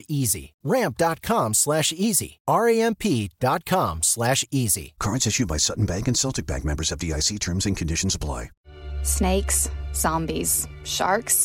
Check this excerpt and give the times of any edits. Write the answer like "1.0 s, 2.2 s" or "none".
8.6 s

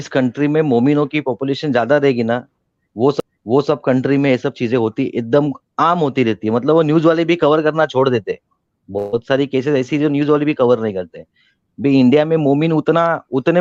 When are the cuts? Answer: none

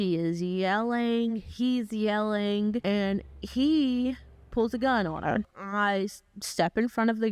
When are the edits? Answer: 2.8 s, 5.6 s

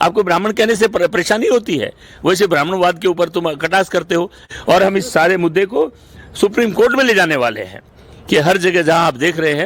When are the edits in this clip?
4.4 s

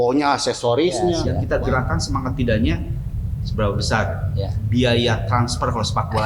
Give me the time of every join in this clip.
1.3 s

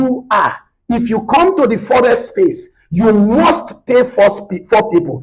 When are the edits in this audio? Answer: none

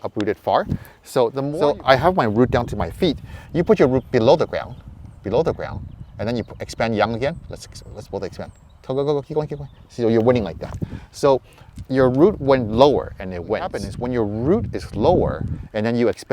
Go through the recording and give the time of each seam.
1.4 s, 13.9 s

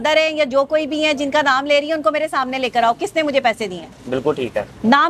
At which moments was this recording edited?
none

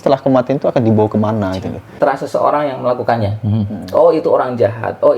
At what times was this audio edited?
2.0 s

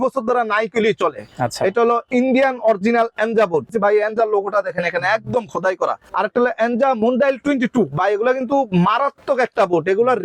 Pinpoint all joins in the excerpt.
3.7 s, 6.0 s

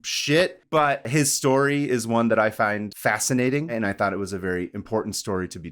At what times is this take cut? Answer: 1.0 s, 2.9 s, 3.7 s

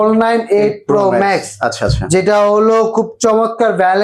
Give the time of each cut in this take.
none

